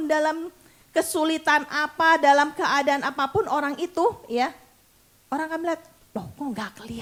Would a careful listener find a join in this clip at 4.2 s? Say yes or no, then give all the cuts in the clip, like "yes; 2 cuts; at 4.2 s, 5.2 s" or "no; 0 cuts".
no; 0 cuts